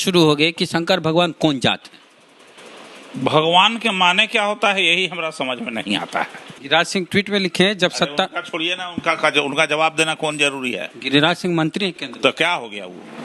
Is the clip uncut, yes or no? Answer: no